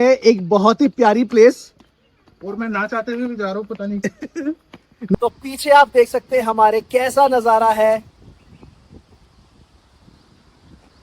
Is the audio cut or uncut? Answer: cut